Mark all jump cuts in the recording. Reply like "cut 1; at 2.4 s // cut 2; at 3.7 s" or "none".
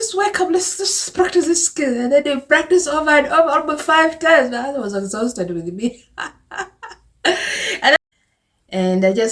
cut 1; at 8.0 s